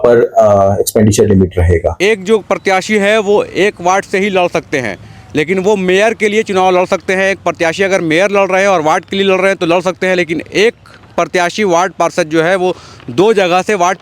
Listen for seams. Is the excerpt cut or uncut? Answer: cut